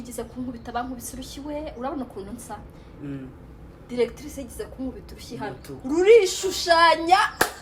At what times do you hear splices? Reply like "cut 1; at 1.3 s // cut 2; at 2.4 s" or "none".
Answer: none